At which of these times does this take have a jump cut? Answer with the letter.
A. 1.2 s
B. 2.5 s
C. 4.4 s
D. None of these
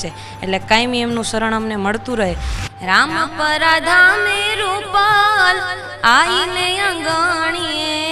B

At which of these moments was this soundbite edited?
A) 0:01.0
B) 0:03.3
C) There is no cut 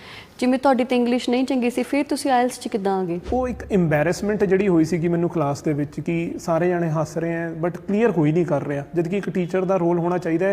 B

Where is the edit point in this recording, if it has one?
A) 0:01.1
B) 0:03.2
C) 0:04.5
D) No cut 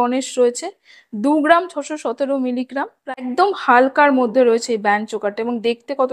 B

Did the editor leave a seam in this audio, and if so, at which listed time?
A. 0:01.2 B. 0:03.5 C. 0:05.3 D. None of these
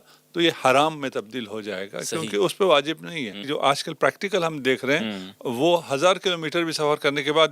B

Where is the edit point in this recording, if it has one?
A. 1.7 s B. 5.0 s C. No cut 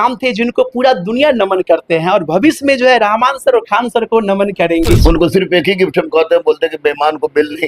B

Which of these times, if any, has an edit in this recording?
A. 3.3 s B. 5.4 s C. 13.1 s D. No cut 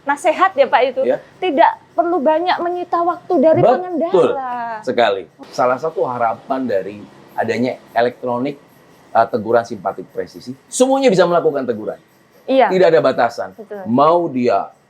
B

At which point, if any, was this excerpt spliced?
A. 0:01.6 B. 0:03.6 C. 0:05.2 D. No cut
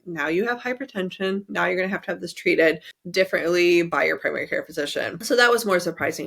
C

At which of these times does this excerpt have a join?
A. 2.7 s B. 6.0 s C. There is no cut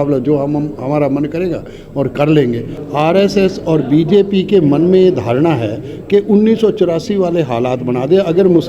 A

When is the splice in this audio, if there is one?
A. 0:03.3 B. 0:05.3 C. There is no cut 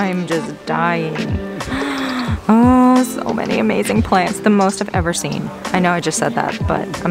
C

